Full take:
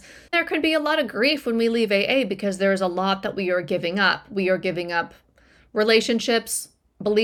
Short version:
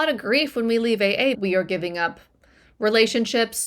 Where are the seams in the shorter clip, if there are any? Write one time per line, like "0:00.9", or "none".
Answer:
0:01.4